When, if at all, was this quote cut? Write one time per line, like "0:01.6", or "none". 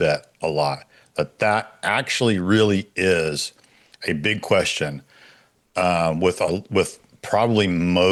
none